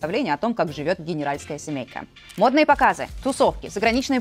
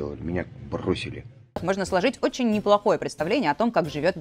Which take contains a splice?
second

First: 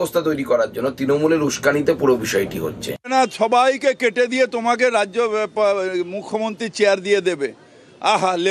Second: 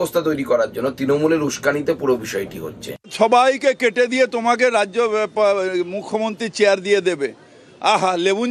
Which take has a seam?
second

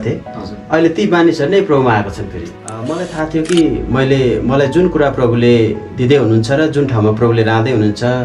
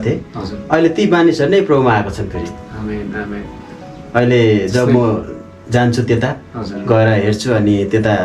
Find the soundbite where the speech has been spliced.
first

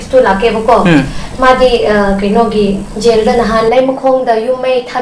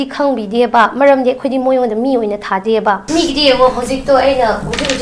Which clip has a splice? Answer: second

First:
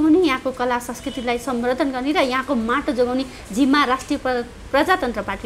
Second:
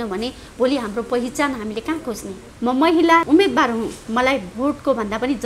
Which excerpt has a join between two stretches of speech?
second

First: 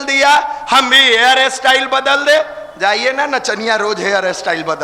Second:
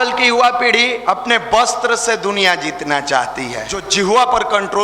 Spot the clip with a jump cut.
second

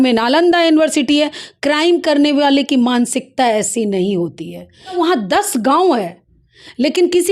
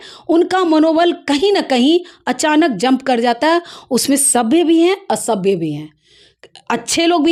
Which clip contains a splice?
first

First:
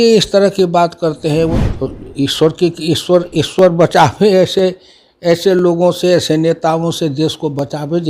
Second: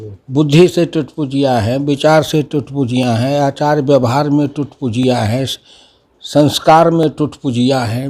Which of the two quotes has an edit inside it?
first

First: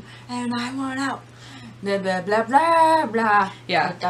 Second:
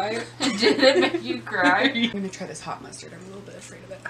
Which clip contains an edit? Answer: second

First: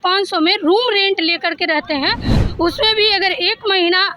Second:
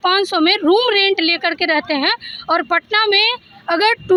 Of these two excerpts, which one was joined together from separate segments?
first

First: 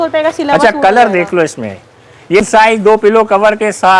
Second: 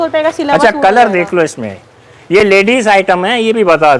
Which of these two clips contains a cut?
first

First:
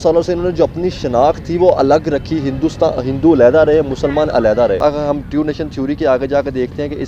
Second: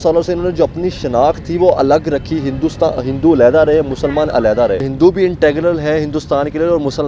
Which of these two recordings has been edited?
second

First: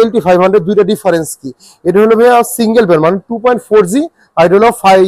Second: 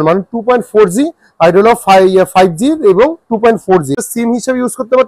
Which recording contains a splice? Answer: second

